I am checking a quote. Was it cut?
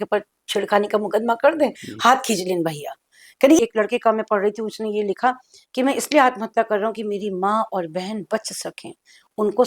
yes; 1 cut; at 3.6 s

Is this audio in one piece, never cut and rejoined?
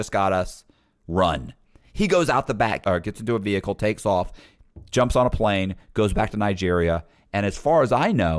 no; 1 cut; at 2.8 s

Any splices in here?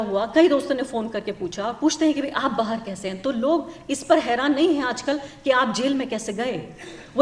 no; 0 cuts

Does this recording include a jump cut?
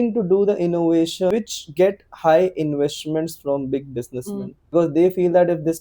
yes; 2 cuts; at 1.3 s, 4.7 s

